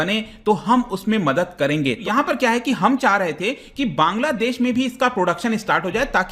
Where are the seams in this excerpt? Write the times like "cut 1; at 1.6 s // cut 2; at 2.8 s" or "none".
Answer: cut 1; at 2.1 s